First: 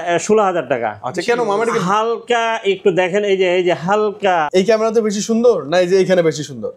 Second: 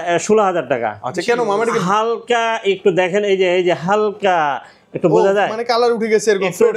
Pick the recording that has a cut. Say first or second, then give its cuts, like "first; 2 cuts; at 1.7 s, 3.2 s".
first; 1 cut; at 4.5 s